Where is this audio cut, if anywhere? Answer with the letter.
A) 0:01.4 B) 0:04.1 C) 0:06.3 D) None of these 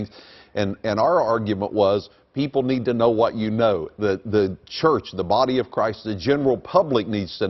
A